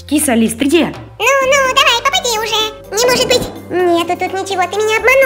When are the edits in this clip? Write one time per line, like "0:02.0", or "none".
0:01.1
0:02.7
0:03.6